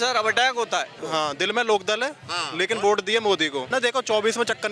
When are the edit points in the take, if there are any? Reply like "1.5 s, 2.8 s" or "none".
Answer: 1.0 s, 3.7 s